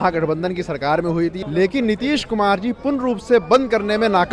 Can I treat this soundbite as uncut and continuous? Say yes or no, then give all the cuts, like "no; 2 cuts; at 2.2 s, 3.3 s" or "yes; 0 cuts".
no; 1 cut; at 1.4 s